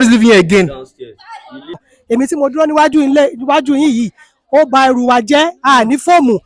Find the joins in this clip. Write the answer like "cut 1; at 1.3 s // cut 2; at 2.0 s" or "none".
cut 1; at 1.9 s